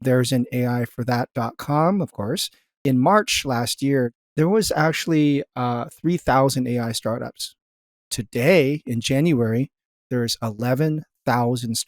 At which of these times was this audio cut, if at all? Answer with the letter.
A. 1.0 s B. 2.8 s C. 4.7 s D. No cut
B